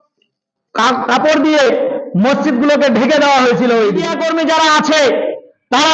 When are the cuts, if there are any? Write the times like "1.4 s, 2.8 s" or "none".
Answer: 4.1 s

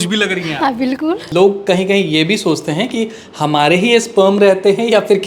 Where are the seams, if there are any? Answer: 1.3 s

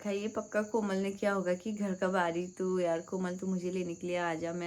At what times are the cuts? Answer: none

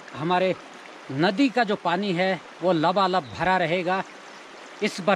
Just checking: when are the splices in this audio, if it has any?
none

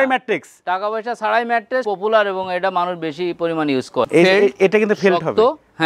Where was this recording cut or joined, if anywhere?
1.8 s, 4.1 s

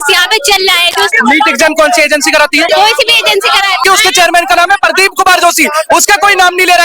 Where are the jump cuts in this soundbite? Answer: 1.1 s, 2.7 s, 3.8 s

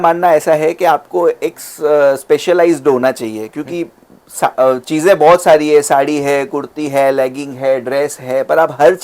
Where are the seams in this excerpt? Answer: none

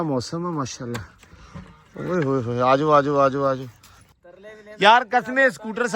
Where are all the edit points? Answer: 4.0 s

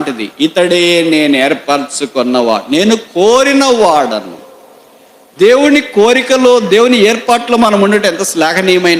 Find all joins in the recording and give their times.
none

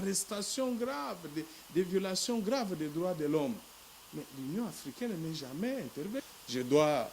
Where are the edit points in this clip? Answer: 6.2 s

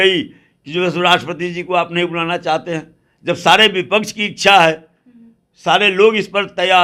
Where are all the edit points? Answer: none

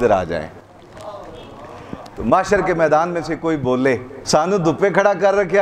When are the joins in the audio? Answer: 2.1 s, 4.1 s

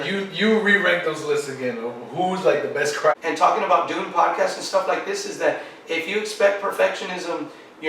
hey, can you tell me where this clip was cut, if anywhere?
3.1 s

